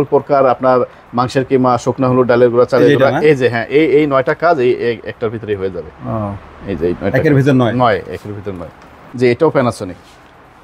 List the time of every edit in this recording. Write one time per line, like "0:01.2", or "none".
0:09.0